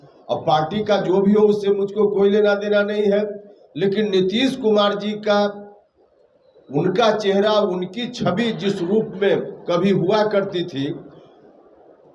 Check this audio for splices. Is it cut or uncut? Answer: uncut